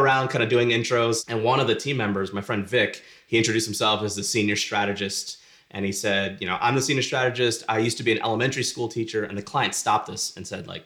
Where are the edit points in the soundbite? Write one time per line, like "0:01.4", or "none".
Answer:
0:01.2